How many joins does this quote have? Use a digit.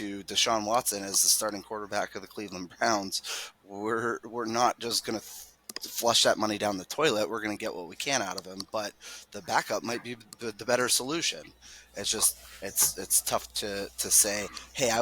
0